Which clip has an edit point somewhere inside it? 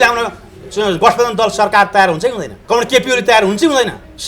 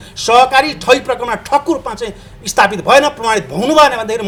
first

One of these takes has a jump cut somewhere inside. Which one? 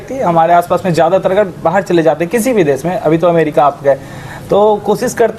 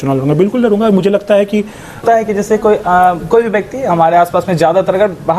second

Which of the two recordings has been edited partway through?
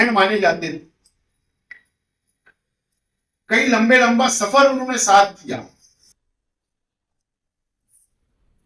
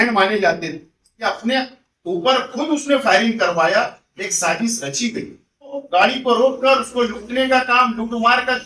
second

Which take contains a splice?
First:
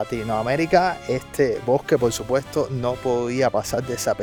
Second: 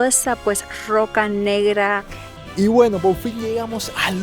second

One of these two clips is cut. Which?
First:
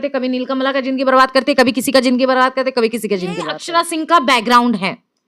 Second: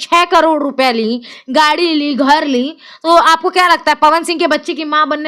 first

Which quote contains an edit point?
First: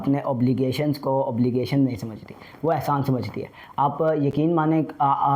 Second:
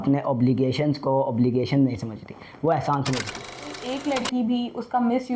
second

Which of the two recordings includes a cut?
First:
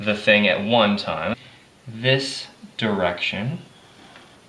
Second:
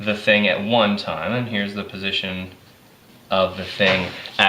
second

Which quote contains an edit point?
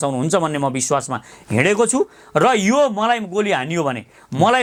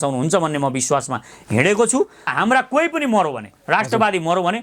second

